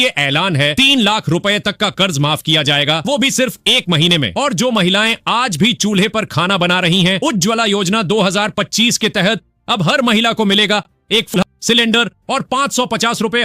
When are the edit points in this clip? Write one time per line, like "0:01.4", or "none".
0:11.3